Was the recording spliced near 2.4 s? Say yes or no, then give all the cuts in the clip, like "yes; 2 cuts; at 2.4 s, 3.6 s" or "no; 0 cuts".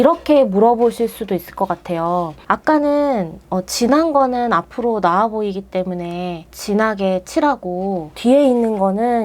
yes; 3 cuts; at 2.4 s, 6.5 s, 8.1 s